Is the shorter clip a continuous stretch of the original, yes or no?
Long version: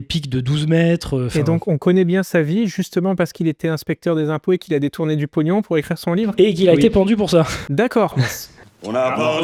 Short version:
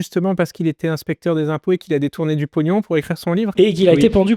yes